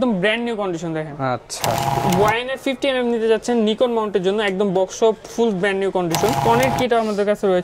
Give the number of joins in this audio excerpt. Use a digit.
2